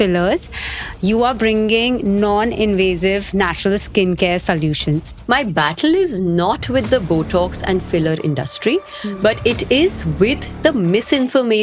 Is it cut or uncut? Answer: cut